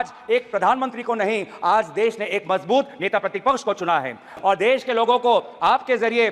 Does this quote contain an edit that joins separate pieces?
yes; 1 cut; at 4.3 s

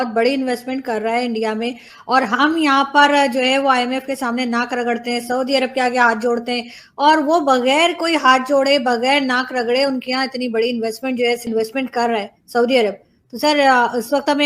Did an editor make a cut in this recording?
yes; 1 cut; at 11.4 s

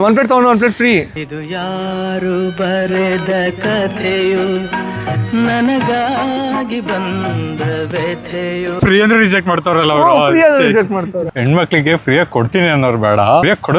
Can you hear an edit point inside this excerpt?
yes; 2 cuts; at 8.8 s, 11.3 s

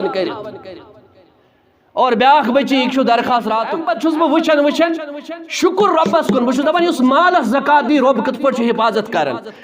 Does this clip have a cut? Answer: yes; 1 cut; at 3.8 s

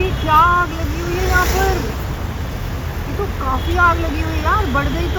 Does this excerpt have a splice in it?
no; 0 cuts

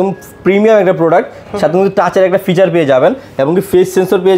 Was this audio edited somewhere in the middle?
no; 0 cuts

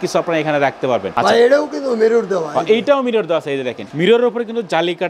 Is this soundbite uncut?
yes; 0 cuts

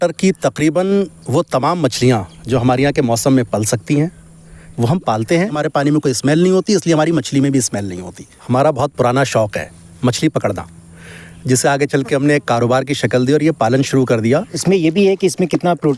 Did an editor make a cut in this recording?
yes; 3 cuts; at 5.5 s, 8.4 s, 14.6 s

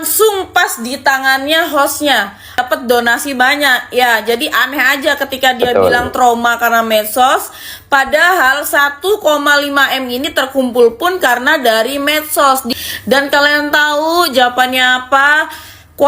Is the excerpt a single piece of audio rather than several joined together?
no; 2 cuts; at 2.6 s, 12.7 s

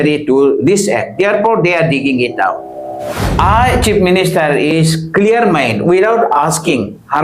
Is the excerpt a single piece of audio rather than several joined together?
no; 1 cut; at 3.1 s

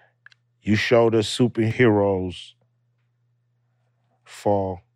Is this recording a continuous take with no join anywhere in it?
no; 1 cut; at 1.7 s

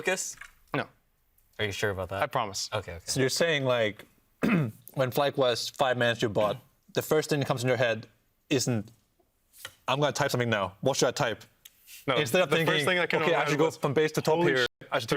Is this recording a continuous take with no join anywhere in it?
yes; 0 cuts

